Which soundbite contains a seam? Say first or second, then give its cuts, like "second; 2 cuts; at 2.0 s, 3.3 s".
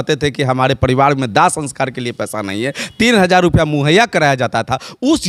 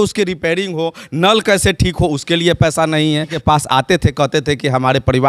second; 1 cut; at 3.3 s